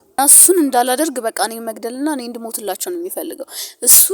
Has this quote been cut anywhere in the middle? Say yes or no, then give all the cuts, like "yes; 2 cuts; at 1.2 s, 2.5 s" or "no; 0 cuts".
no; 0 cuts